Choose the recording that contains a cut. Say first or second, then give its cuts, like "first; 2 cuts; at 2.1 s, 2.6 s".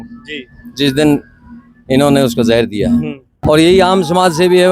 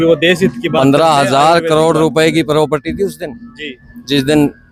first; 1 cut; at 3.2 s